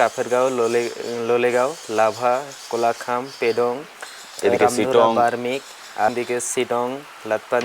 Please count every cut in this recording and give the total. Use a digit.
1